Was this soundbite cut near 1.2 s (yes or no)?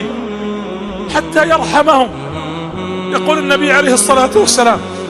no